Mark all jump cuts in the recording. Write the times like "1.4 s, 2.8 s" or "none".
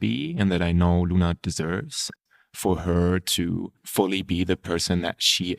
2.0 s, 3.8 s

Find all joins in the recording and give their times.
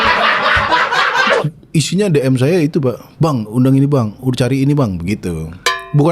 1.3 s

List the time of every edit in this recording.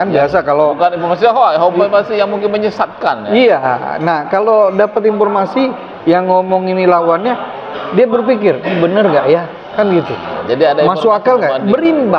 none

